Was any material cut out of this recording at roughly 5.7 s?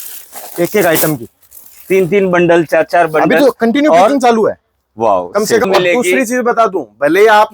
yes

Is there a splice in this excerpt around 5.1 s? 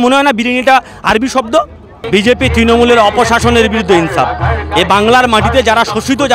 no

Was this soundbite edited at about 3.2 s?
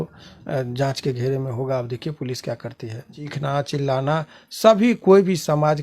yes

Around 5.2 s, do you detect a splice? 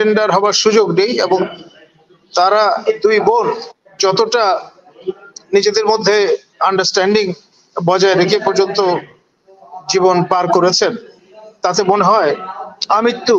no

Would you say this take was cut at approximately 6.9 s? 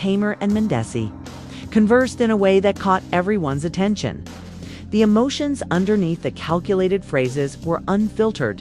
no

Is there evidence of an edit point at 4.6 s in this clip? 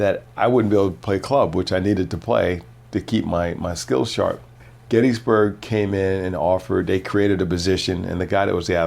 yes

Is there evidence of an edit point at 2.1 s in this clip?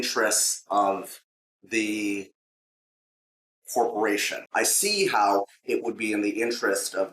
no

